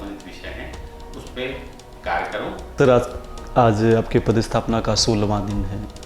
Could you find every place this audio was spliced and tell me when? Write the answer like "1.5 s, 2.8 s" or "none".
2.7 s